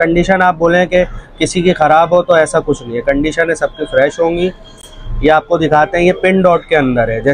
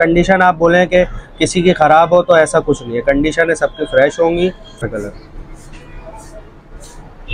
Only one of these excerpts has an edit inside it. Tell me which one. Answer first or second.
second